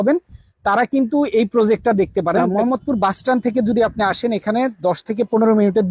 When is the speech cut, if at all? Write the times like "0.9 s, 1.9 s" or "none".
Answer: 2.4 s